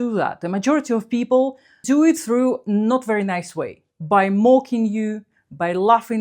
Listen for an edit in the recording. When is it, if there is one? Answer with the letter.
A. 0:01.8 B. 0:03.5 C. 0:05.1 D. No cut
A